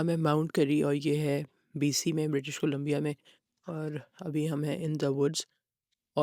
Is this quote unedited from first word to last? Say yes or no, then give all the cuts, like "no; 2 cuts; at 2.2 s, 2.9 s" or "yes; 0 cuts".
yes; 0 cuts